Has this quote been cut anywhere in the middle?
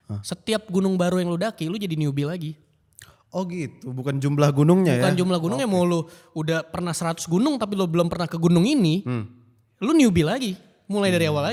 no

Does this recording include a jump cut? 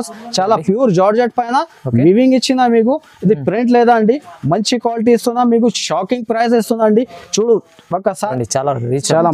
yes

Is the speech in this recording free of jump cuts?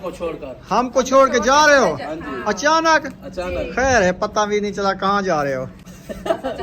yes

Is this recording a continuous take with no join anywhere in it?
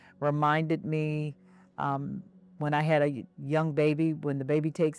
yes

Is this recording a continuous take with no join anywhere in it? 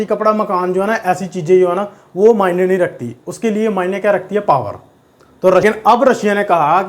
no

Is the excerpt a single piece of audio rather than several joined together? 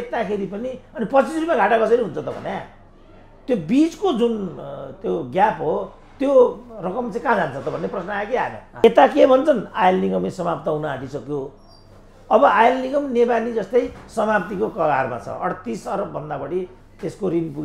no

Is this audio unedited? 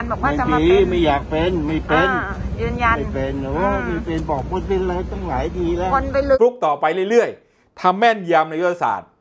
no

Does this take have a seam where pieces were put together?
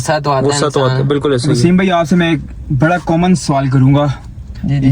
yes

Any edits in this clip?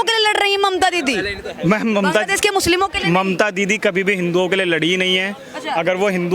no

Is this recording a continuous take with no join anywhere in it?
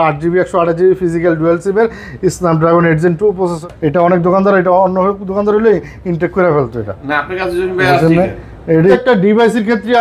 no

